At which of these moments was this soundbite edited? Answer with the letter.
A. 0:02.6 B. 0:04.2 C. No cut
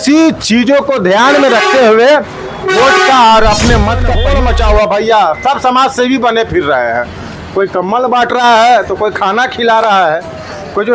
B